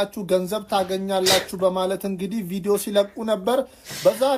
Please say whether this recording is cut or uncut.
uncut